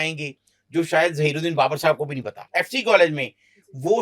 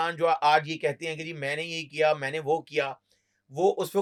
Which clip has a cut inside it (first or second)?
first